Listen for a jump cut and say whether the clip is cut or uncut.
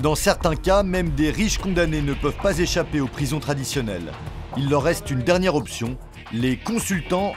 uncut